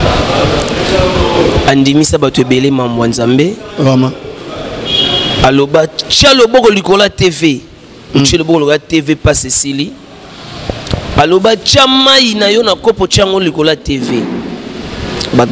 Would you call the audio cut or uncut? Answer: uncut